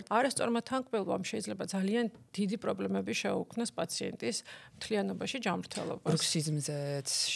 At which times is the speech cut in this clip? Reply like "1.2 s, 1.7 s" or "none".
none